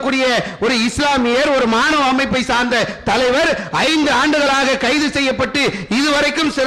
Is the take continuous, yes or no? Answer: yes